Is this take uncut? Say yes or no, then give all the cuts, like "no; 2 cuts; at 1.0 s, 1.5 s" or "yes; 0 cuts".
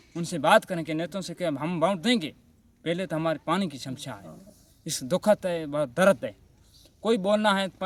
yes; 0 cuts